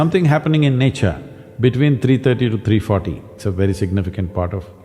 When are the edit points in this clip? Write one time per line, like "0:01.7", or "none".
0:03.3